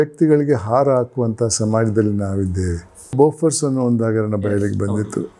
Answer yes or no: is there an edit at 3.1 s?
yes